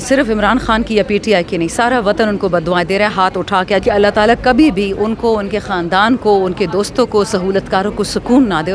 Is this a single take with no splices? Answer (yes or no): no